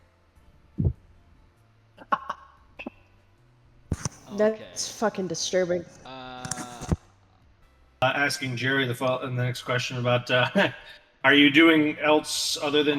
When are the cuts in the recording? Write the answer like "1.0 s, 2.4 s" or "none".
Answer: 8.0 s